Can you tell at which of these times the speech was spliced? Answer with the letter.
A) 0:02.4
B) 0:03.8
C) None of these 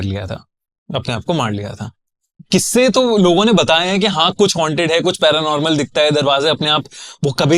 A